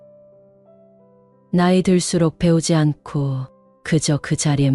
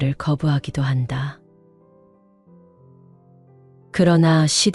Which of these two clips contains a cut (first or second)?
second